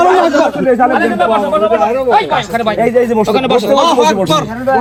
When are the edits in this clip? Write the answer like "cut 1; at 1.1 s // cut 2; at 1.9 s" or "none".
none